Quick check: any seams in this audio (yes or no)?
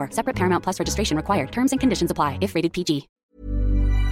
yes